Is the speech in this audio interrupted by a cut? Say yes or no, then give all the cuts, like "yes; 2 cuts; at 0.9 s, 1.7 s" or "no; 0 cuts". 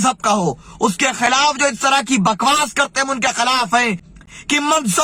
yes; 1 cut; at 4.1 s